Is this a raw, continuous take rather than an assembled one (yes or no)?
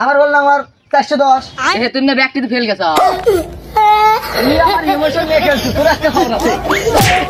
yes